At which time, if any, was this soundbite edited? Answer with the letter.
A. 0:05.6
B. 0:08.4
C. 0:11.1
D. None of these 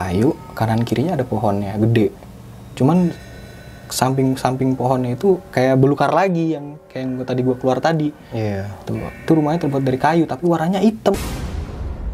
C